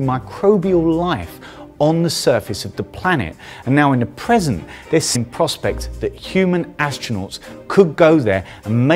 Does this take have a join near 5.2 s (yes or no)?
no